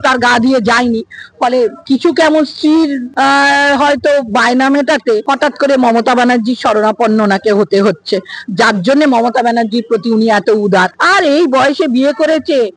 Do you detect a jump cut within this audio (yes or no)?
yes